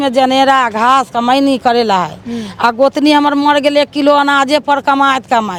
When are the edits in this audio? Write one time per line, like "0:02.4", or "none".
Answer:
none